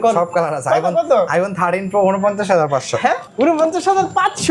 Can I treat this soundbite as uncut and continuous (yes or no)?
yes